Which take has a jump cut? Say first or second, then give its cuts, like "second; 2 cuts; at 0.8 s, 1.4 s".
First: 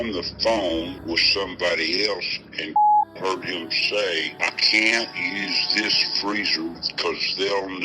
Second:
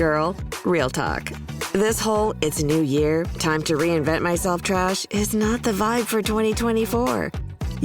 first; 2 cuts; at 1.0 s, 4.3 s